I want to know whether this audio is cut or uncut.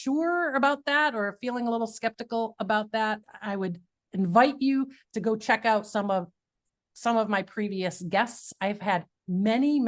cut